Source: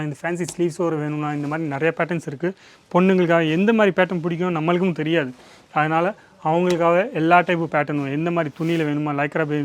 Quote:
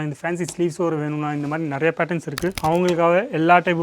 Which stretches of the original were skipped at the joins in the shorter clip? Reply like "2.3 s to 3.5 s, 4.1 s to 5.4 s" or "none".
2.6 s to 6.4 s